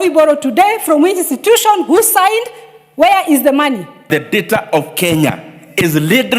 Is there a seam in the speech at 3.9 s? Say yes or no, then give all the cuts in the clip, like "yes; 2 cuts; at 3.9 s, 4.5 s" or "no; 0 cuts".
yes; 1 cut; at 3.9 s